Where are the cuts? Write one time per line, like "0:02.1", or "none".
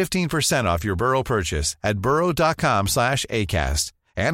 none